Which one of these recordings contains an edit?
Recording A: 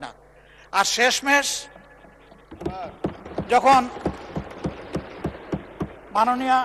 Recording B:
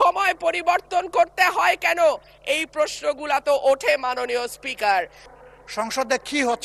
B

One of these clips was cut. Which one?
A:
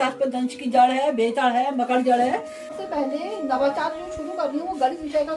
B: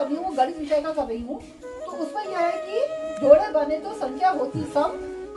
A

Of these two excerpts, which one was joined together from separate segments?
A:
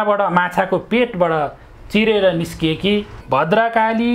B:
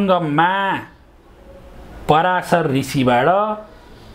A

